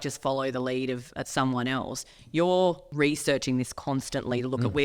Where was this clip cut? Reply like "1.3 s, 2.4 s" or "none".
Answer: 2.8 s